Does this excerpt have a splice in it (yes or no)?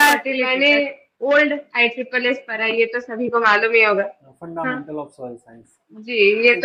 no